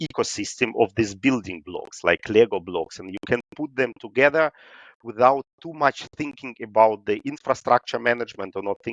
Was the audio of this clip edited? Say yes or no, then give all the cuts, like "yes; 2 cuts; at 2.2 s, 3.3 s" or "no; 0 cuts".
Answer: no; 0 cuts